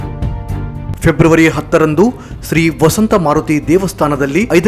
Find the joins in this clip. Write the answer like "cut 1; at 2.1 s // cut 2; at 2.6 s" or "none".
cut 1; at 0.9 s